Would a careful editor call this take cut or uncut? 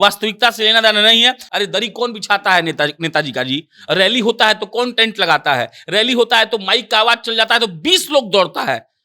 cut